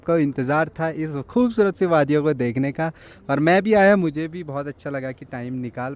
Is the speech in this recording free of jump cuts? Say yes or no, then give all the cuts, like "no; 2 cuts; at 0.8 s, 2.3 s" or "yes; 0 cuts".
yes; 0 cuts